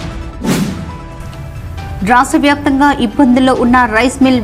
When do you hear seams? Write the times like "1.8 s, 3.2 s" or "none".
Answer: 1.0 s

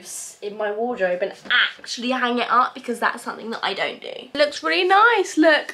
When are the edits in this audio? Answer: 4.3 s

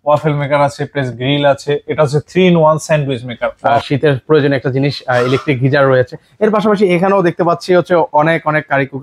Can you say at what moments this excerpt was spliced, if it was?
3.8 s

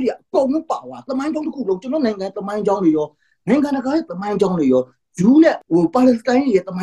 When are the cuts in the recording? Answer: 5.6 s

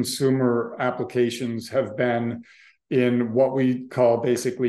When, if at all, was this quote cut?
none

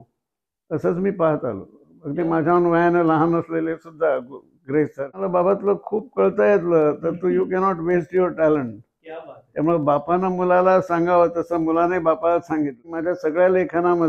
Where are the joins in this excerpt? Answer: 5.2 s, 13.0 s

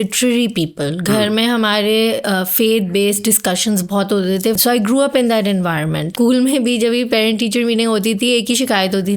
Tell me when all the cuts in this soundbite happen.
4.6 s, 6.1 s

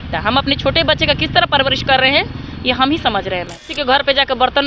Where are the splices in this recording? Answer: 3.6 s

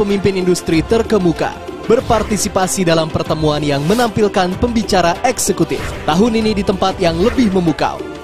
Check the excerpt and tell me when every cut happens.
none

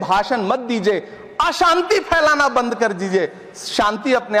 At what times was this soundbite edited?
none

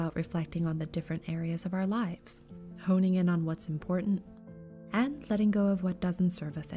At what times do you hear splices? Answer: 1.3 s, 4.2 s

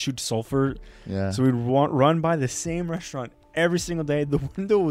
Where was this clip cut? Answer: none

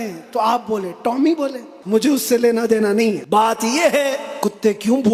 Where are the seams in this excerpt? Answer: 1.7 s, 3.2 s, 4.3 s

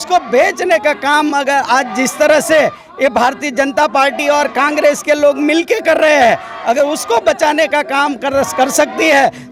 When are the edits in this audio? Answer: none

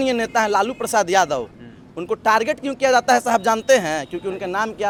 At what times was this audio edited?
none

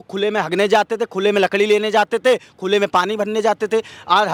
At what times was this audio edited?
none

